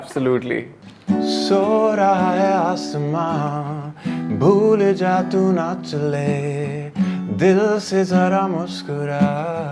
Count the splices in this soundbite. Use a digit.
1